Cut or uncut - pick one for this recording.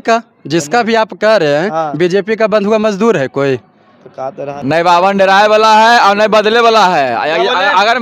cut